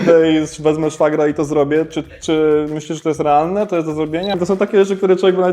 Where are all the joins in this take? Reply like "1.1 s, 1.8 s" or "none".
4.4 s